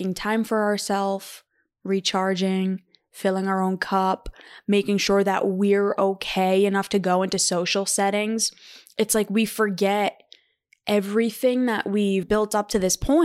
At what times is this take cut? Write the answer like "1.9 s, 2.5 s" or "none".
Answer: 12.2 s